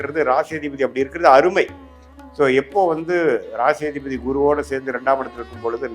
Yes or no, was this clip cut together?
no